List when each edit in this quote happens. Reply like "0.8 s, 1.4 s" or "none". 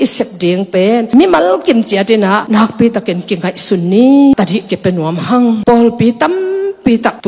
2.4 s, 4.3 s, 5.6 s

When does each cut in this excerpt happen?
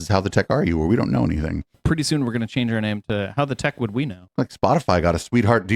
1.8 s, 4.2 s

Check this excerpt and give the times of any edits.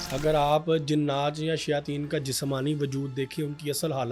none

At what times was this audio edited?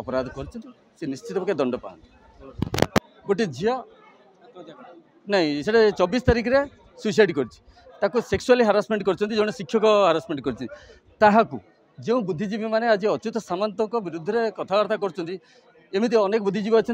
3.0 s

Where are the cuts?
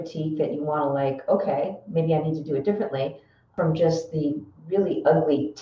3.5 s, 4.5 s

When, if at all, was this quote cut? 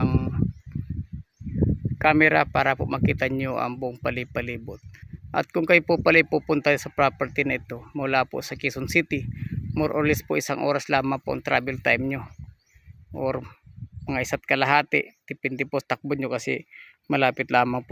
none

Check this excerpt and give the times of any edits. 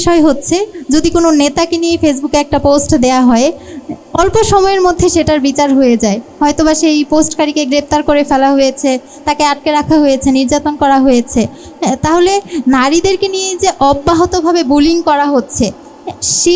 none

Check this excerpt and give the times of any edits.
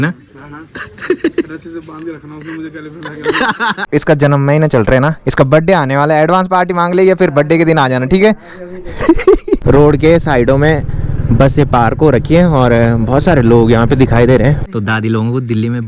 3.8 s, 9.6 s, 14.6 s

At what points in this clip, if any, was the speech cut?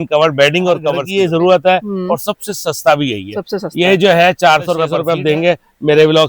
1.0 s, 4.9 s

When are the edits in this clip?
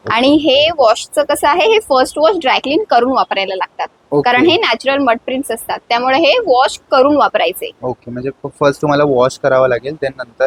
none

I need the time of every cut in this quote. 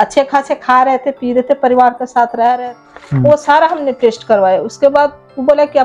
2.8 s

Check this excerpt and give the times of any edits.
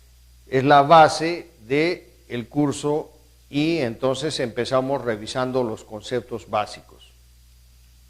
5.9 s

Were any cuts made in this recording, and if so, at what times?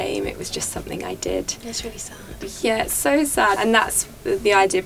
3.6 s

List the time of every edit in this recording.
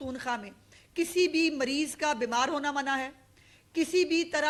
none

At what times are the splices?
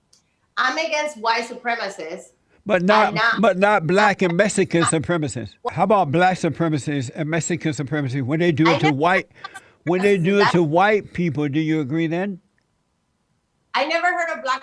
5.5 s

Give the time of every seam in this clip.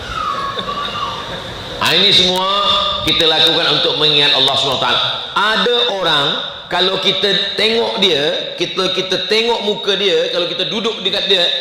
none

